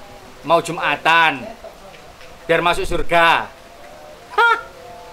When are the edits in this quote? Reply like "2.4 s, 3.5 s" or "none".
none